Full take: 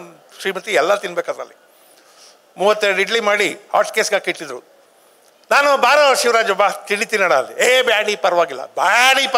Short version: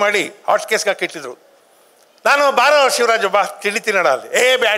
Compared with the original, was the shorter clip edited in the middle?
no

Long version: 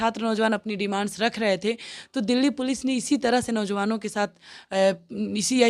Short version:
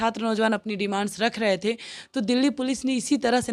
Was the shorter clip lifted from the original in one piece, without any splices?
yes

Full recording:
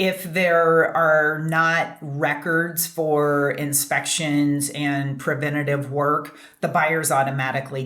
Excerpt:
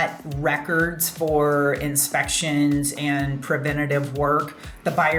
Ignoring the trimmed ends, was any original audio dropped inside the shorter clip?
no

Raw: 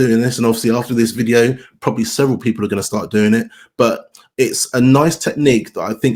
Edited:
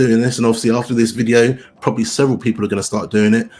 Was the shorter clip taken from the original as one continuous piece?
yes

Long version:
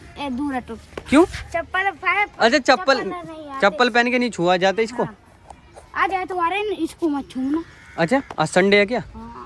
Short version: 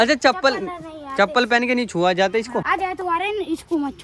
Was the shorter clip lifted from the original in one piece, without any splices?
no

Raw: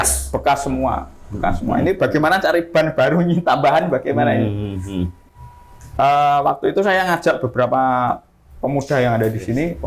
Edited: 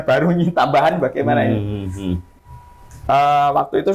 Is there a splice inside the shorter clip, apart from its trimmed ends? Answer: no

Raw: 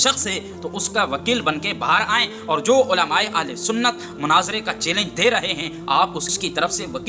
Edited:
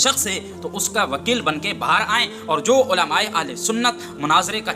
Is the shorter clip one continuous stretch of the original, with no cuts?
yes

